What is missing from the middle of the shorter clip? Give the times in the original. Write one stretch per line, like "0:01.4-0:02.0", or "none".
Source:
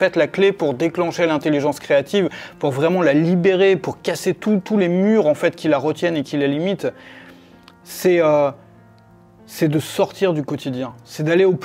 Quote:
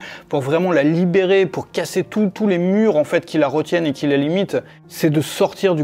0:07.1-0:09.4